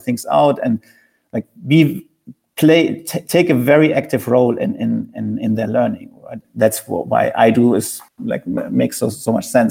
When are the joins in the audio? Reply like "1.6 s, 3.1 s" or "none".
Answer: 6.4 s, 8.0 s